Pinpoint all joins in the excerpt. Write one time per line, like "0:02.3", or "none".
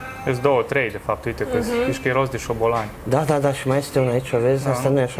none